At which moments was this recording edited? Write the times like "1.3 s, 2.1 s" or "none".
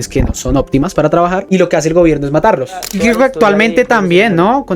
1.4 s, 2.9 s